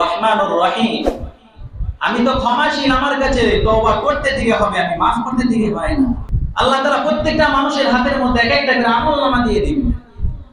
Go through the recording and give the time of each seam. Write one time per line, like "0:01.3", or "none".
0:06.4